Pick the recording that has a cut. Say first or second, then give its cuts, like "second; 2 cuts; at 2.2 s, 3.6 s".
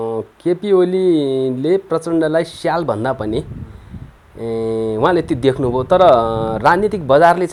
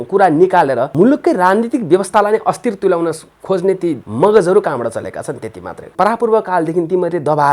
second; 3 cuts; at 0.9 s, 4.1 s, 5.9 s